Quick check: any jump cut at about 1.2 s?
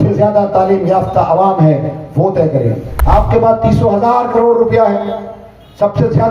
no; 1 cut; at 2.9 s

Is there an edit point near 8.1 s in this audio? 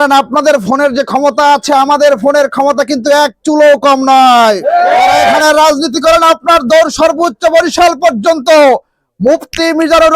no; 1 cut; at 5.4 s

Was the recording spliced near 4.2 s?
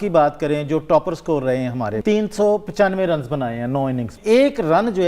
yes; 2 cuts; at 1.9 s, 4.2 s

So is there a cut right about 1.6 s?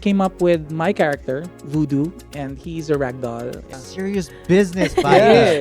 yes; 2 cuts; at 1.6 s, 3.7 s

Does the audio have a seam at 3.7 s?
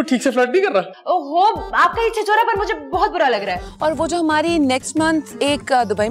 yes; 1 cut; at 3.7 s

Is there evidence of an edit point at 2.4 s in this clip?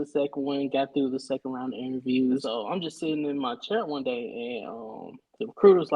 yes; 1 cut; at 2.4 s

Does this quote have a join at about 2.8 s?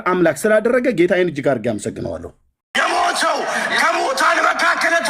yes; 1 cut; at 2.8 s

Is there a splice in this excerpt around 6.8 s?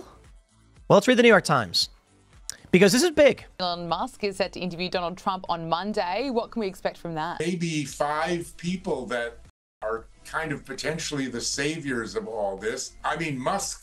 no; 1 cut; at 3.5 s

